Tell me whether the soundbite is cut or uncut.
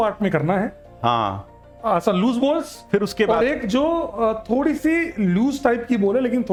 uncut